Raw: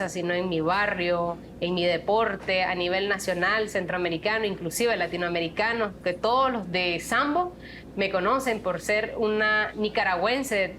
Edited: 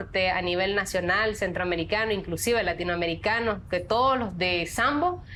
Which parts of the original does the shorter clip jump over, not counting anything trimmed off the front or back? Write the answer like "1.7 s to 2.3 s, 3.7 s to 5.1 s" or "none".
none